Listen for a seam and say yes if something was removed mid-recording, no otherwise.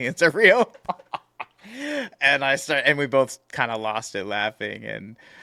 no